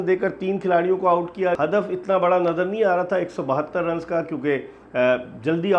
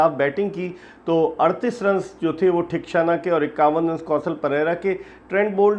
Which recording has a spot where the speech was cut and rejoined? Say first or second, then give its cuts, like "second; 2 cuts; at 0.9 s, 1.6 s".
first; 1 cut; at 1.6 s